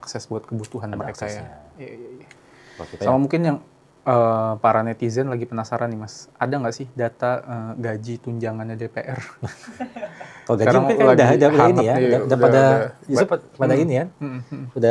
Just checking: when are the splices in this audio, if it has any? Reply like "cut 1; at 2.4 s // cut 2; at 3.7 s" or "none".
cut 1; at 3.1 s

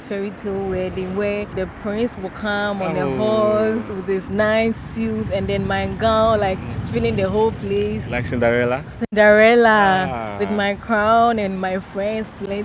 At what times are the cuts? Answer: cut 1; at 1.5 s // cut 2; at 4.3 s

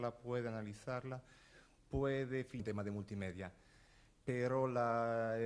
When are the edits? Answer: none

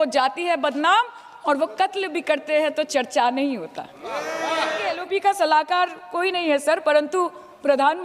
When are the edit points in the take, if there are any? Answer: cut 1; at 4.9 s

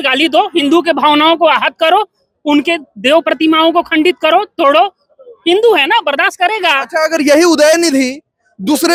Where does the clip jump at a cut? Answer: none

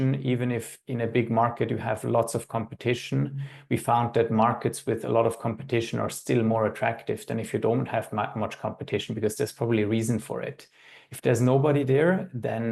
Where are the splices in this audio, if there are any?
none

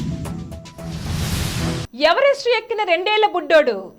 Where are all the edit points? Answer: none

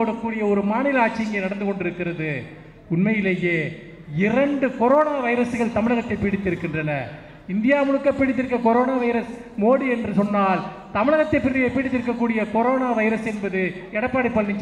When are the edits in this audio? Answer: none

